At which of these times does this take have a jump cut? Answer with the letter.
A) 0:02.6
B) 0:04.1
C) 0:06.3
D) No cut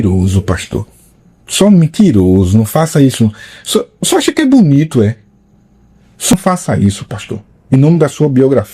C